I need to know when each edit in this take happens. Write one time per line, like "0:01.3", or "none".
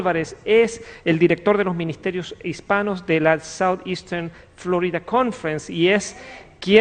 0:03.1